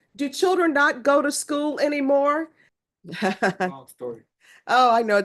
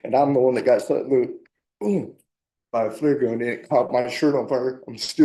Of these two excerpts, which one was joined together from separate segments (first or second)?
first